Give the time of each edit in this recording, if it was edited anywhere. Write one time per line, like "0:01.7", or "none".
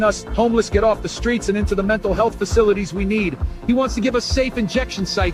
none